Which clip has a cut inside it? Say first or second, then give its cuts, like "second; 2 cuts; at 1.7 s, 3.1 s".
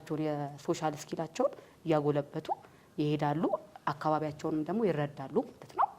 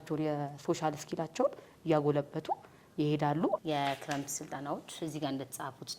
second; 1 cut; at 3.6 s